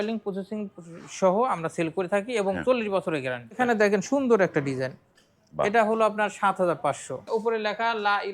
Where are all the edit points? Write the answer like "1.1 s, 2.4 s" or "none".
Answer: 3.6 s, 7.2 s